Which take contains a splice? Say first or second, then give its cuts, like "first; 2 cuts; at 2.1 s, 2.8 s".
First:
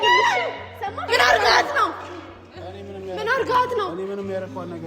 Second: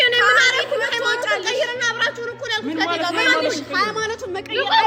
first; 1 cut; at 1.0 s